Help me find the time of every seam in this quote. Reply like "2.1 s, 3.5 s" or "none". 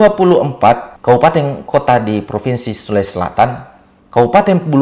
0.9 s, 1.6 s